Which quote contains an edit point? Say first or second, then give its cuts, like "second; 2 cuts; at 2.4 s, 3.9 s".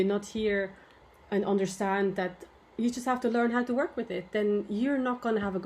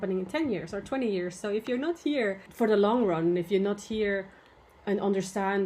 second; 1 cut; at 2.5 s